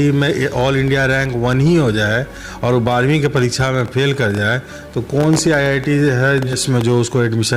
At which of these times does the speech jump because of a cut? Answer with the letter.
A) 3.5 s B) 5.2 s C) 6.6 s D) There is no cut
C